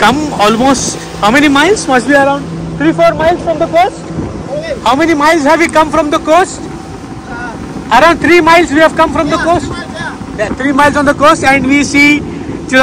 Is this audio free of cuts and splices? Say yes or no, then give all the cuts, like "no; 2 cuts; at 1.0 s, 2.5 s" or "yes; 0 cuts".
yes; 0 cuts